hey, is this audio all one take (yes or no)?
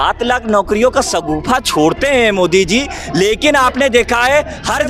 yes